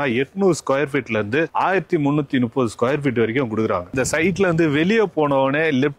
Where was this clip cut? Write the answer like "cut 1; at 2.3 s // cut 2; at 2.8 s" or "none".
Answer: cut 1; at 3.9 s